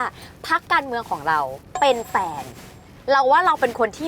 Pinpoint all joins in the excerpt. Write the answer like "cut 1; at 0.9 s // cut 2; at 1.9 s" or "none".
cut 1; at 1.6 s